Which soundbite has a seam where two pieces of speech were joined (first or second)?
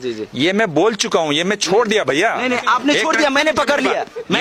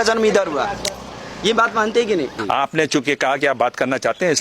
second